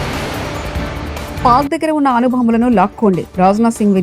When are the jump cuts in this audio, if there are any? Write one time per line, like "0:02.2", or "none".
0:01.4